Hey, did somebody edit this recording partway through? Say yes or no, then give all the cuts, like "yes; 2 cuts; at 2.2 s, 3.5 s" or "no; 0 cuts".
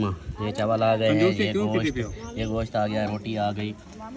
no; 0 cuts